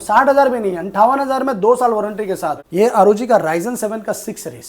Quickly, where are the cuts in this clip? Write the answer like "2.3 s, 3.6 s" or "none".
2.6 s